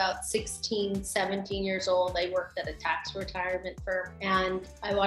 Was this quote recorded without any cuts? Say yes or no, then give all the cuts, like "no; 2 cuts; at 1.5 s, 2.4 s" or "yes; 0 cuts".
no; 1 cut; at 4.1 s